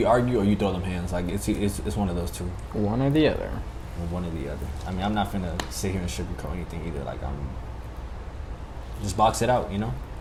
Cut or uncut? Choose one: uncut